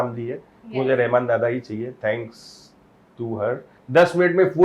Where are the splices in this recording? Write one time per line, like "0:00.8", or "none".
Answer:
0:03.7